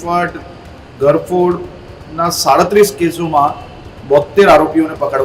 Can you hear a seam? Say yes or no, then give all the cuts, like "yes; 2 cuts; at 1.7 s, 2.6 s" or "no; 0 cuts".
no; 0 cuts